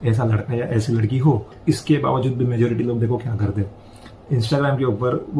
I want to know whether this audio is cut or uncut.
cut